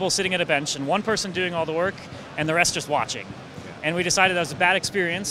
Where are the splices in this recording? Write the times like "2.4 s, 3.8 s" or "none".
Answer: none